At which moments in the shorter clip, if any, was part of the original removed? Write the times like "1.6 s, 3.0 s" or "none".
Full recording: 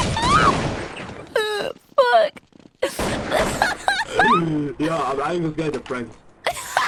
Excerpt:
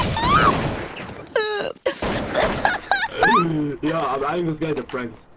1.7 s